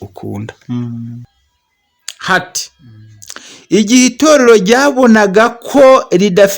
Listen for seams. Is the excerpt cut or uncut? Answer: cut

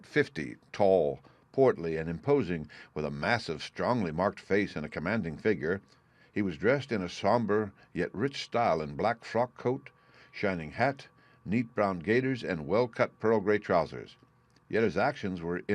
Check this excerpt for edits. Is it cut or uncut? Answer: cut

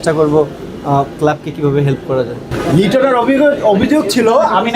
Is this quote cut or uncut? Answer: cut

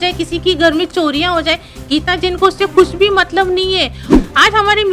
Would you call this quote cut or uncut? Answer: cut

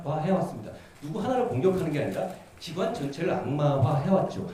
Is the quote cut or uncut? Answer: uncut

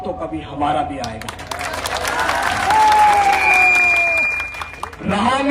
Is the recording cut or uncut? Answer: uncut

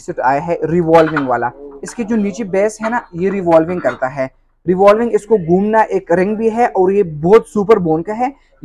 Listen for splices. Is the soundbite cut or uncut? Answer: uncut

